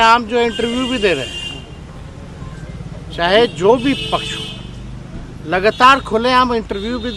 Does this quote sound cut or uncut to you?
uncut